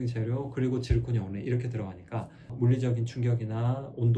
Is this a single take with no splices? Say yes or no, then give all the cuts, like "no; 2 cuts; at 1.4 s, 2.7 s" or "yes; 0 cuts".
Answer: no; 1 cut; at 2.5 s